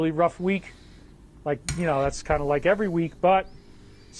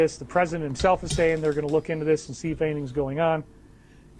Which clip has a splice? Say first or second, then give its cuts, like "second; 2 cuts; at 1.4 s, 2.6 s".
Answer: second; 1 cut; at 2.5 s